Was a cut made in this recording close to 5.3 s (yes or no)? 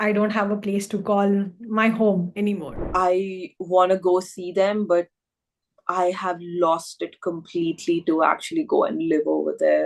no